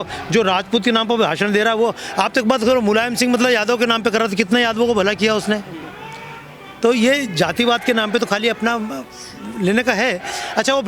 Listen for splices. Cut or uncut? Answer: uncut